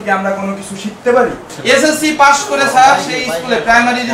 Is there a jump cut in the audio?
yes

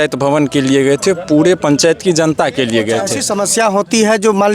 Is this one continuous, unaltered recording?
no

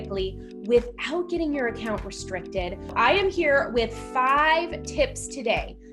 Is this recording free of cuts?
no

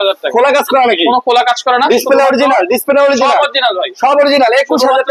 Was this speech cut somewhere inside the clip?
no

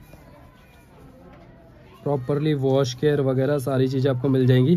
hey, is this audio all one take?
yes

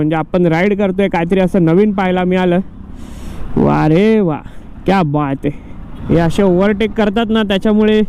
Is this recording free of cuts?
no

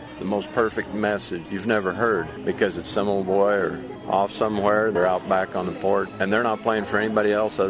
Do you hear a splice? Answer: yes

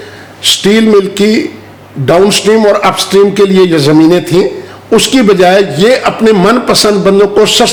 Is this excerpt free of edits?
yes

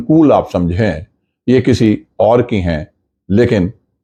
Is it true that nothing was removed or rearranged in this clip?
yes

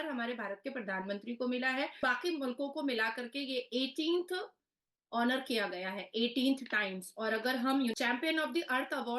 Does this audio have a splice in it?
yes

